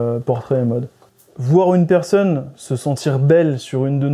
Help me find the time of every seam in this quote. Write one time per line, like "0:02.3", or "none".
0:01.0